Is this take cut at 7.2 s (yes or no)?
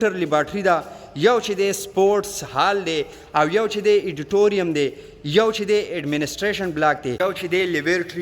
yes